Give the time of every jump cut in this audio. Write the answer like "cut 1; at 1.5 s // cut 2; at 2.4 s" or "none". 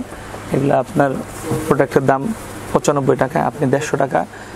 none